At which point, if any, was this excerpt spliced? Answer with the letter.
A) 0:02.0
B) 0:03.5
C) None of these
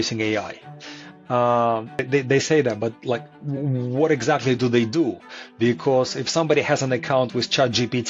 A